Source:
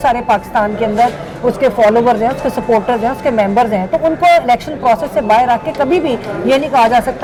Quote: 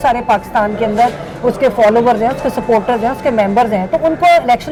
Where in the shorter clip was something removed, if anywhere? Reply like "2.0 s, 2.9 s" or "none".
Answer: none